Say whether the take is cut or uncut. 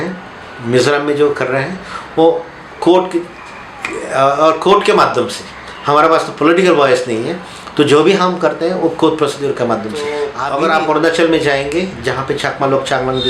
cut